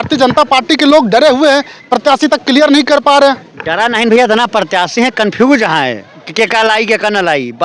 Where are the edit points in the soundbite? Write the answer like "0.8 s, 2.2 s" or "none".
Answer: none